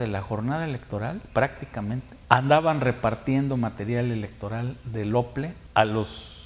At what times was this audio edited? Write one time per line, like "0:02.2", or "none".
0:02.1
0:05.6